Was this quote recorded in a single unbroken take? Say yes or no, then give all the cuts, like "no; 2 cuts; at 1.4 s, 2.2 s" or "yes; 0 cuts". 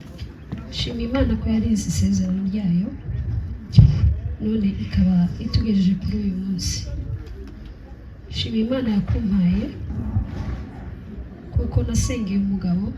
yes; 0 cuts